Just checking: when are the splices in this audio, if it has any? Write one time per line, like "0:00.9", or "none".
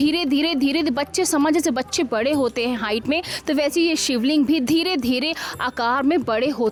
none

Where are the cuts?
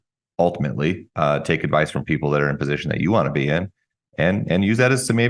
none

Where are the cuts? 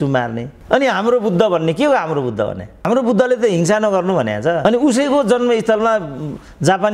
none

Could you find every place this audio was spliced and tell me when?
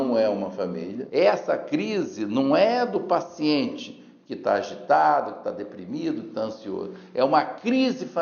0:01.0

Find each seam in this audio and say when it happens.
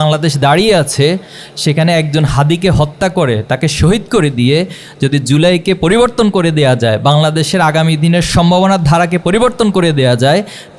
none

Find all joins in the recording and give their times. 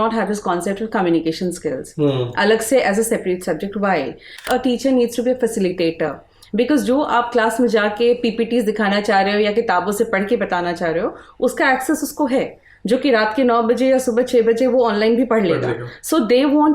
0:04.4

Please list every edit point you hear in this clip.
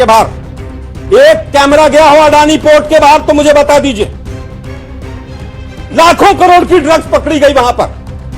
0:04.1
0:05.9

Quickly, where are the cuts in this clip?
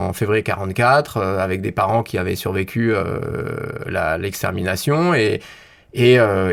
none

